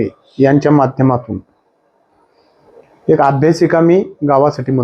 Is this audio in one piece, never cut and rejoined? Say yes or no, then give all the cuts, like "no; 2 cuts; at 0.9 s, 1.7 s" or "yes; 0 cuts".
yes; 0 cuts